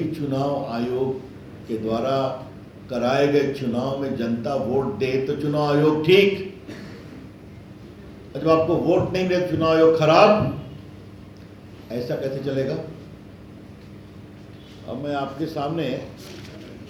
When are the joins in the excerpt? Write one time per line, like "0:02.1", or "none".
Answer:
none

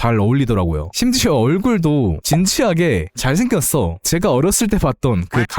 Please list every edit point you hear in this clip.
0:02.2

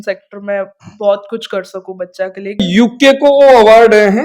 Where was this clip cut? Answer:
0:02.7

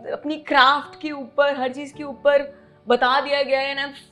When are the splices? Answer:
none

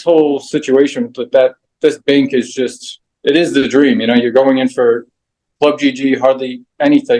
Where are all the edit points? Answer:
none

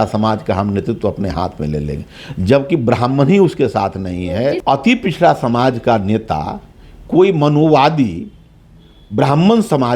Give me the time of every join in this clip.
0:04.6

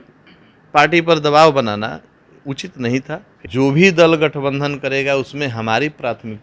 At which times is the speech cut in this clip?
0:03.3

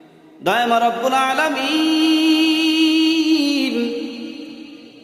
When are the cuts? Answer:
none

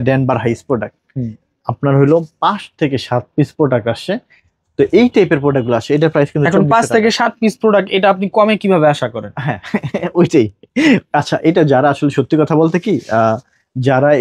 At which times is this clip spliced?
none

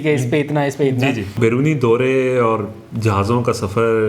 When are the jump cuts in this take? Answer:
0:01.4

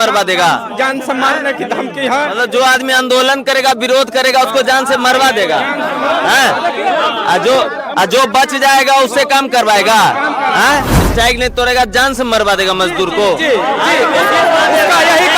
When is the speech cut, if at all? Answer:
0:11.0

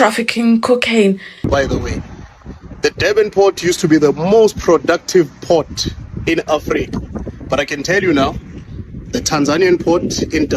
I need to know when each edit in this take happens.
0:01.5

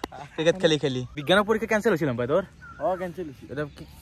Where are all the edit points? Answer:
0:01.2

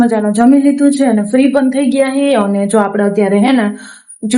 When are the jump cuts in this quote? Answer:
none

